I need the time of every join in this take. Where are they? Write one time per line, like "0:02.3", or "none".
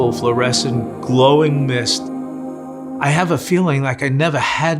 0:02.5